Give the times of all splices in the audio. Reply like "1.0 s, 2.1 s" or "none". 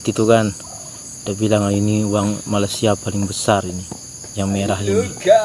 none